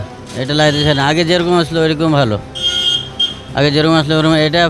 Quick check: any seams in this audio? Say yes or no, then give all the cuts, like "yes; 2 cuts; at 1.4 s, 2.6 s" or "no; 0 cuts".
no; 0 cuts